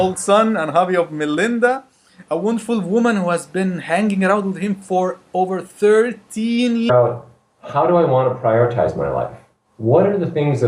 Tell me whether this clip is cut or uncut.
uncut